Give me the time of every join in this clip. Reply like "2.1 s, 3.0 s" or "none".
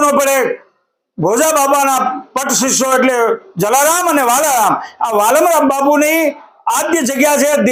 none